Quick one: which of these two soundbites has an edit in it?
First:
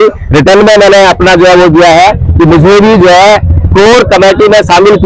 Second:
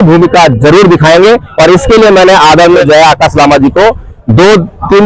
second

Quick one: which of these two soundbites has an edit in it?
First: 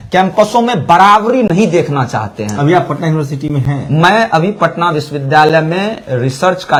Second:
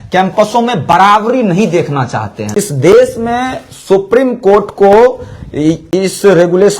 second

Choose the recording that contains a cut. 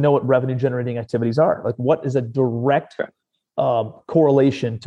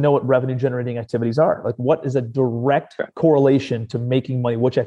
second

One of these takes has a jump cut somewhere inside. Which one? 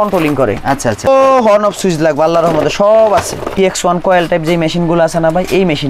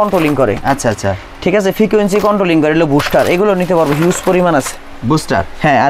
first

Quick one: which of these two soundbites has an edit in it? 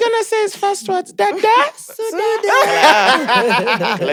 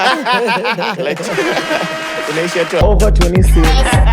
second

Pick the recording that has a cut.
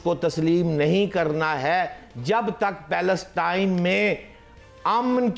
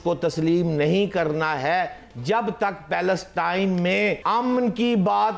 second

